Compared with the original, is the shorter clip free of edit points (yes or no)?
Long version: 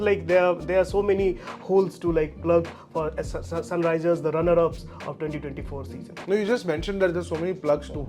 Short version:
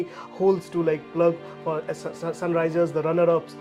yes